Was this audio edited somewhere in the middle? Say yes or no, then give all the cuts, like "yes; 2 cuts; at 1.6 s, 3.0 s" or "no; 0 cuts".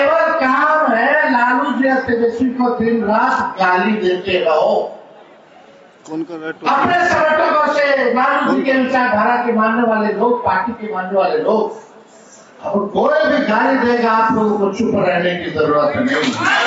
no; 0 cuts